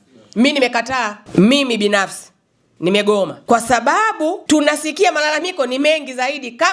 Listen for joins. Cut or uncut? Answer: cut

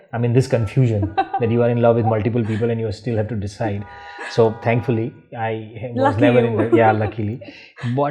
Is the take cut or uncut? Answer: uncut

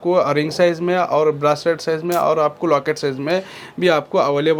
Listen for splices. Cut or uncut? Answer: uncut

